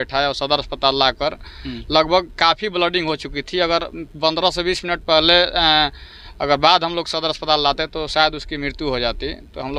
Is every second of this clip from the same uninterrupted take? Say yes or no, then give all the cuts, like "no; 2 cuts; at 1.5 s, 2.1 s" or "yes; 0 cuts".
yes; 0 cuts